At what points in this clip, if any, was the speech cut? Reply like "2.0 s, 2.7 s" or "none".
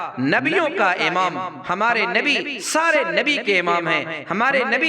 none